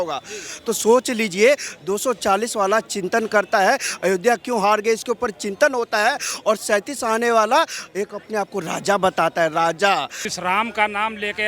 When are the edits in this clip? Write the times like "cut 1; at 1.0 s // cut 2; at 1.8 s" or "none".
cut 1; at 10.2 s